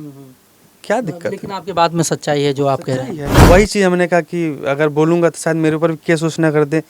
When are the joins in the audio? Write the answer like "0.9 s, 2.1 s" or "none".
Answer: 3.3 s